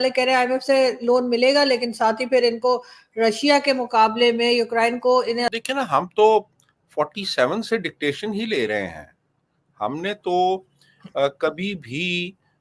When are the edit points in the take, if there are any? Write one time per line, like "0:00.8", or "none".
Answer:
0:05.5